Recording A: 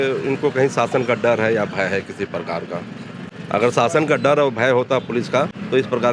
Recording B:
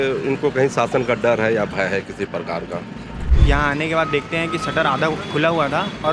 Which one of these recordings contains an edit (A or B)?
B